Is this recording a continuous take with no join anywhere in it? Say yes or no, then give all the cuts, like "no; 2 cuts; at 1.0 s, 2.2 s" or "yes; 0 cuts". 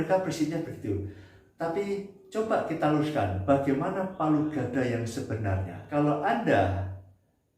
no; 1 cut; at 5.8 s